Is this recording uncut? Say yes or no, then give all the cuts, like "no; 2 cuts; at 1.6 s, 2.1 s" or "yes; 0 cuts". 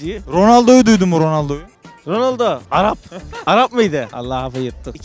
no; 1 cut; at 4.1 s